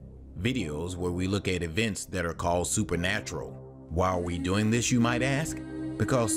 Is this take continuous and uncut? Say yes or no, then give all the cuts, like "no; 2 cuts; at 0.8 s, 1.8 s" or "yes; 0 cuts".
yes; 0 cuts